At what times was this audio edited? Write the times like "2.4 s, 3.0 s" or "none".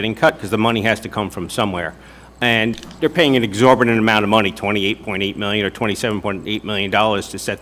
none